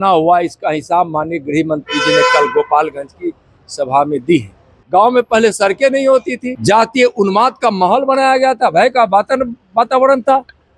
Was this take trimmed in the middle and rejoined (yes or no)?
yes